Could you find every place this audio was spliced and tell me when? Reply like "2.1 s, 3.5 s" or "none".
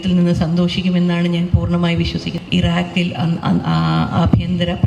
2.3 s